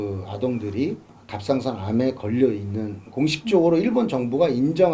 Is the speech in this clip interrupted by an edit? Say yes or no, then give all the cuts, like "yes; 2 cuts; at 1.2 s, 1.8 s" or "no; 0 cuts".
yes; 1 cut; at 1.1 s